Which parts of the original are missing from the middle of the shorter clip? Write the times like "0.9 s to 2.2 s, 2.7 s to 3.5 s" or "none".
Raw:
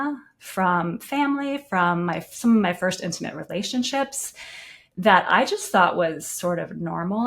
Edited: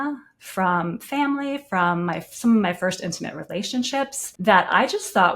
4.2 s to 4.8 s